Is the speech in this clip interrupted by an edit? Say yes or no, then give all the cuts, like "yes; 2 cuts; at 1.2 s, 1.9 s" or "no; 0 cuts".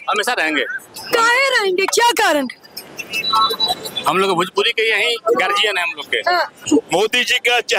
yes; 1 cut; at 6.6 s